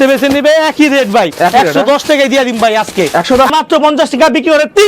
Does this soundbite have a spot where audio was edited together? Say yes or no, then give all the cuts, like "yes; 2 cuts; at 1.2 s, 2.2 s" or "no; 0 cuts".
yes; 1 cut; at 3.5 s